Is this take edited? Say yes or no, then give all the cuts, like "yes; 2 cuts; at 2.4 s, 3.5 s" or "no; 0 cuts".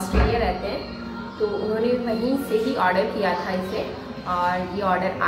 no; 0 cuts